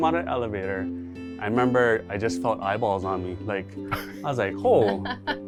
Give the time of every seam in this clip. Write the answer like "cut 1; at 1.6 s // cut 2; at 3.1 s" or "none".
none